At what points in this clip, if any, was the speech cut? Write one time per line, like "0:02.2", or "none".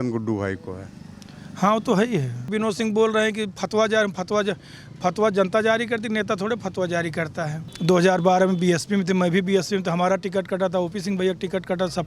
0:02.5
0:07.7